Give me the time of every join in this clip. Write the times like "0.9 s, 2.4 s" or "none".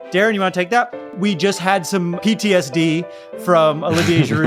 1.1 s